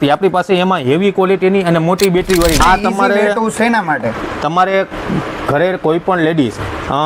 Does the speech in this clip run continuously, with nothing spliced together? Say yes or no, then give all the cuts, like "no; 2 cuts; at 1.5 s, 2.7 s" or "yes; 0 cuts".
no; 1 cut; at 2.6 s